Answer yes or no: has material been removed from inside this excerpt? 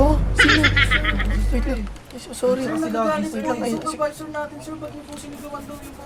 no